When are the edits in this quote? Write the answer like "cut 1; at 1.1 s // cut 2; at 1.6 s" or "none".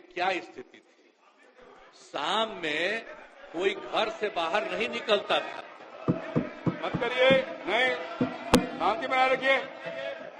none